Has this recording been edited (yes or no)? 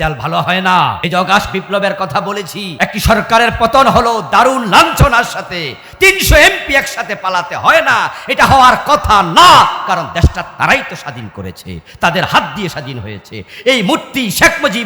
yes